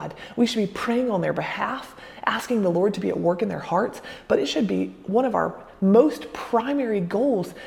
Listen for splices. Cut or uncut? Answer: uncut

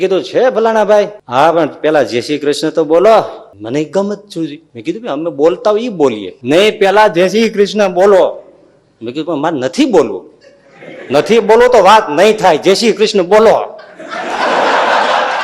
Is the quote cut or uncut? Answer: cut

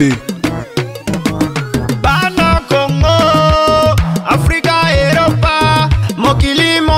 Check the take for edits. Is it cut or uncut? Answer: uncut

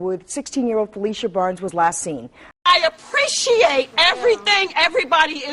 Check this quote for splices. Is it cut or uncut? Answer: cut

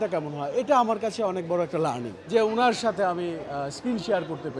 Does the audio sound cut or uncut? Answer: cut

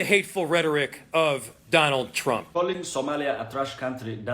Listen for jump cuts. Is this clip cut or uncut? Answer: cut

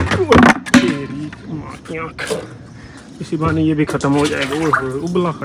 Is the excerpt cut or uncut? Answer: uncut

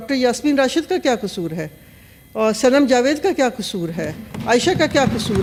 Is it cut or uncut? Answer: uncut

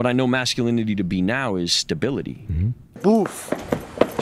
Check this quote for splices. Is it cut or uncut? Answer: cut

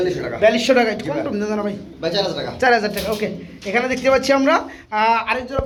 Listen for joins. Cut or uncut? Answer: uncut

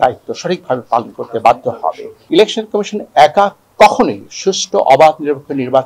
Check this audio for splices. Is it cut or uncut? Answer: cut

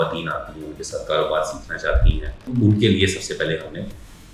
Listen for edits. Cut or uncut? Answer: cut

